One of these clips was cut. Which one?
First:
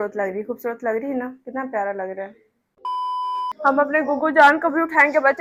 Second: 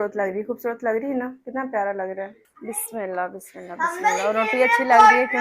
second; 1 cut; at 2.5 s

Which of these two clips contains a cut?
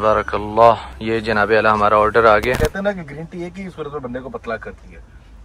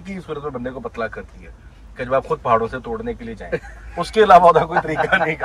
first; 2 cuts; at 0.9 s, 2.6 s

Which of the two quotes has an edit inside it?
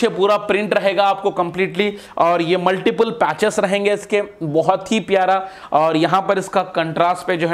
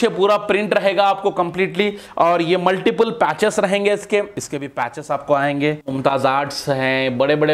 second; 2 cuts; at 4.3 s, 5.8 s

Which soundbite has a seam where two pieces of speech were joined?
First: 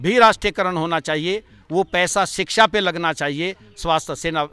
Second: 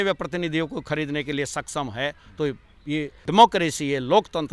second; 1 cut; at 3.2 s

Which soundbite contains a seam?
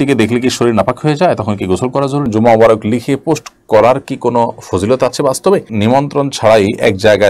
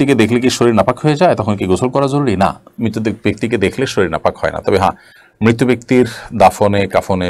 first; 2 cuts; at 2.2 s, 5.7 s

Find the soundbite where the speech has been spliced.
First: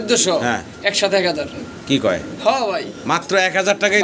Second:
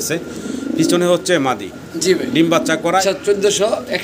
second; 1 cut; at 3.0 s

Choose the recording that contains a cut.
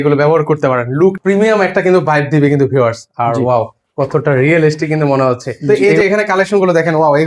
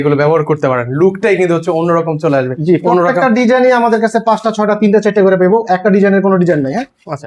first; 2 cuts; at 1.2 s, 5.7 s

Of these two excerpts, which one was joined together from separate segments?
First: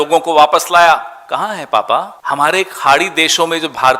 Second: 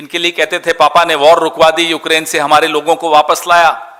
first; 1 cut; at 2.1 s

